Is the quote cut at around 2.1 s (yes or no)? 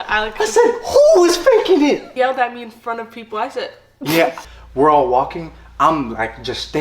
yes